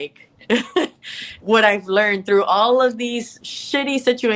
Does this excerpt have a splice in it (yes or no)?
yes